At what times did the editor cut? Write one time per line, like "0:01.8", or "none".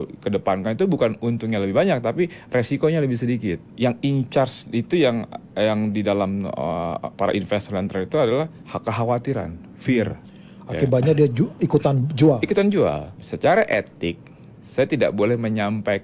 0:03.7
0:08.6
0:13.1